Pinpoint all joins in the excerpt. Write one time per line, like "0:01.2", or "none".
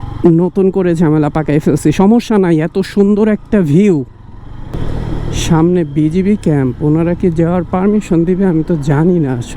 0:04.7